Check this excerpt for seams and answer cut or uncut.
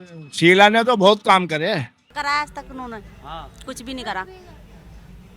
cut